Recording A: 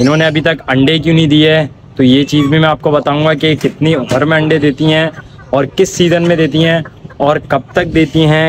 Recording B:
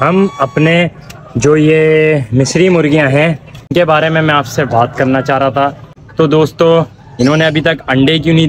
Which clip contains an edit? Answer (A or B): B